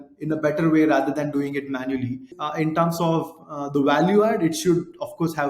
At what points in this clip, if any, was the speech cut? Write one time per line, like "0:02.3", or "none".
0:02.3